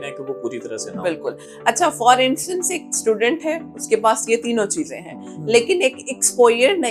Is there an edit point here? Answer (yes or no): no